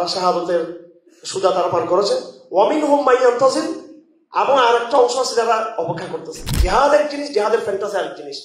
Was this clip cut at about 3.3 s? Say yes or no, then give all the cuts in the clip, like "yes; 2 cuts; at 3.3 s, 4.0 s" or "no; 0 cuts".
no; 1 cut; at 6.5 s